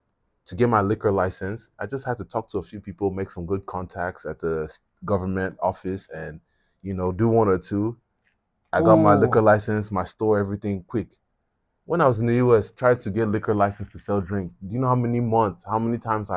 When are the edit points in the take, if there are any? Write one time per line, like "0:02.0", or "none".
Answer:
none